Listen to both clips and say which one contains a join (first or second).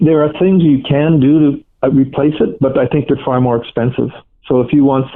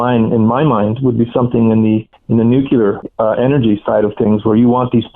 second